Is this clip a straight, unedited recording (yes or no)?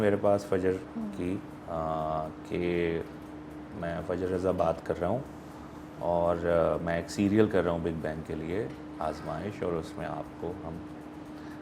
yes